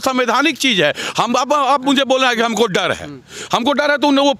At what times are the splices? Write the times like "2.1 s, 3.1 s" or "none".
none